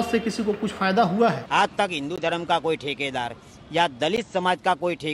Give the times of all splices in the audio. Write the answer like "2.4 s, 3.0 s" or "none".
1.4 s